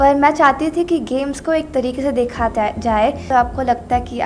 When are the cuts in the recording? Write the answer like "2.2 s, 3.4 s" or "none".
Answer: 3.3 s